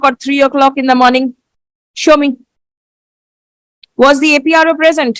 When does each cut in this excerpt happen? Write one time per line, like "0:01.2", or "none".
none